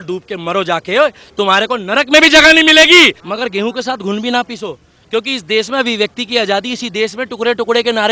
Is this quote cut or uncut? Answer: cut